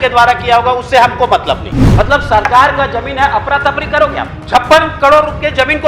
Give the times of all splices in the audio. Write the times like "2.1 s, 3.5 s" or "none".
1.8 s, 4.4 s